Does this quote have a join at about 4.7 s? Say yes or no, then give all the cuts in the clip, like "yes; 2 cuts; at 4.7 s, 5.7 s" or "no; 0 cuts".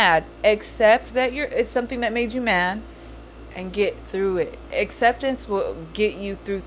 yes; 1 cut; at 4.7 s